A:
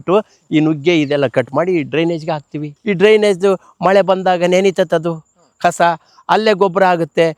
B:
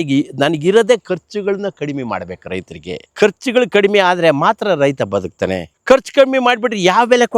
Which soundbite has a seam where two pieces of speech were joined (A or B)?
B